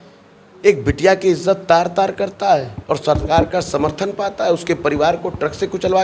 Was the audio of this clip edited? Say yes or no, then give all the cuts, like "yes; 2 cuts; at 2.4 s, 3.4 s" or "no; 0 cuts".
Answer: no; 0 cuts